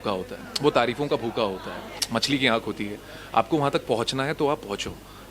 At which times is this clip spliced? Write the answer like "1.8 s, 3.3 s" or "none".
2.0 s

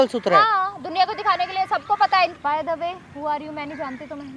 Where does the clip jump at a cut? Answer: 2.4 s

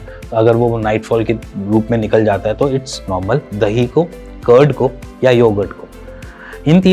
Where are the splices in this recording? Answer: 3.5 s

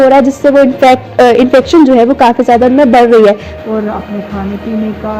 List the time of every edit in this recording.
3.5 s

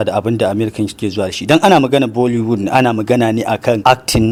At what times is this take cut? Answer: none

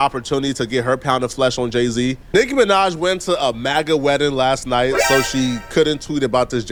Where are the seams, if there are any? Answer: none

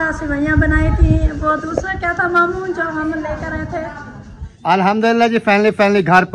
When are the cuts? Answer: 4.5 s

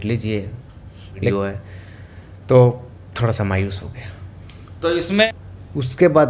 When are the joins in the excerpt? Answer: 1.3 s, 5.2 s

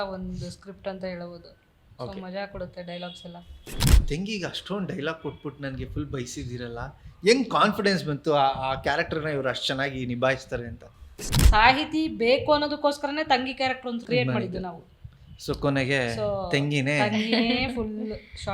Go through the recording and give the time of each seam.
3.9 s, 11.3 s, 14.0 s

